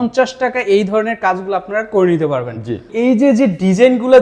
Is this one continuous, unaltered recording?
no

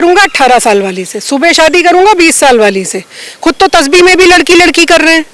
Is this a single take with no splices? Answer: yes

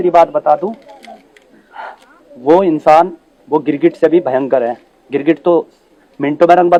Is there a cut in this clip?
no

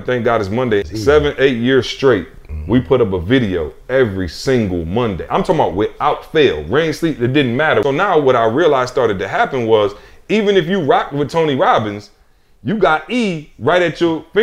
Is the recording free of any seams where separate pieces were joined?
no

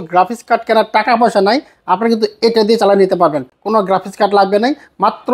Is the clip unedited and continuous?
yes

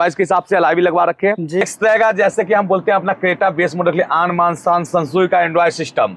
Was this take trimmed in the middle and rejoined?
yes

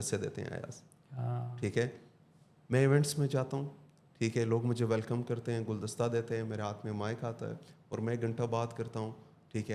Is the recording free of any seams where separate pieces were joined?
yes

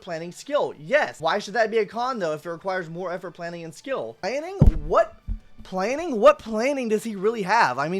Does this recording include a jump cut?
yes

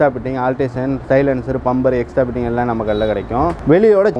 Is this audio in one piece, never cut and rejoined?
yes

